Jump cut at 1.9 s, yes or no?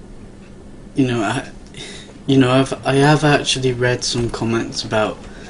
yes